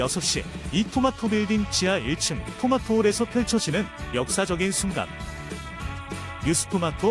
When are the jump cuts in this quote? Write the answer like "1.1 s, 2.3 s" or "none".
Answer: none